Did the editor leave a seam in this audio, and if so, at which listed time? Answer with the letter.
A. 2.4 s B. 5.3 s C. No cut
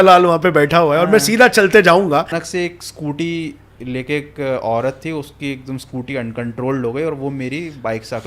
A